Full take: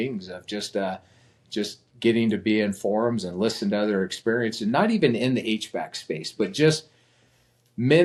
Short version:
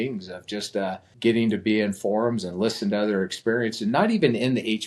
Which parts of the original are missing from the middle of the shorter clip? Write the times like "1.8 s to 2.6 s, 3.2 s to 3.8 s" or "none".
1.1 s to 1.9 s